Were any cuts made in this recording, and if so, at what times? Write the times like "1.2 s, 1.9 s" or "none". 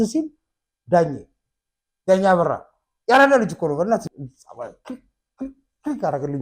4.0 s